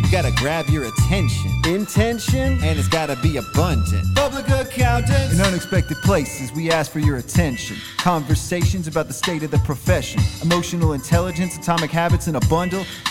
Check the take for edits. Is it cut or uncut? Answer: uncut